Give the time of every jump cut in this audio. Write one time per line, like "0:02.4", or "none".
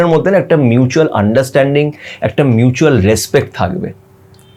none